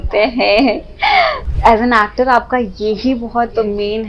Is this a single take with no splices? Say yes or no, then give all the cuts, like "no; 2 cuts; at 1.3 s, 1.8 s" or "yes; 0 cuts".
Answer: no; 1 cut; at 1.4 s